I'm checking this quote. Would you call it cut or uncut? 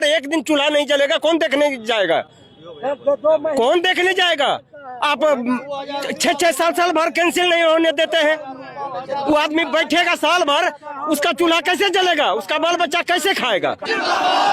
uncut